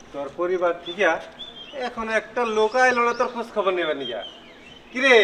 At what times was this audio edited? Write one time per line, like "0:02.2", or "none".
none